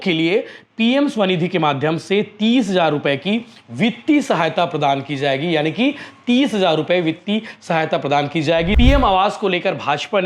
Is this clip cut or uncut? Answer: cut